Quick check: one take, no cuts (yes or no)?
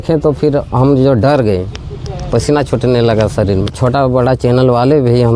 no